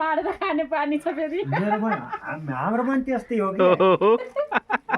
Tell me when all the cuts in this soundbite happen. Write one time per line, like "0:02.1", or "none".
0:03.8